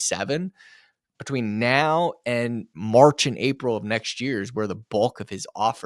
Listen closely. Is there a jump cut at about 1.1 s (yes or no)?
yes